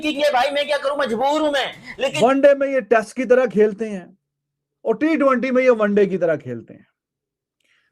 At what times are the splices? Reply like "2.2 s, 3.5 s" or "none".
2.2 s